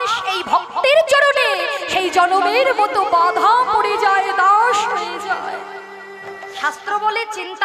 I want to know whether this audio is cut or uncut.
cut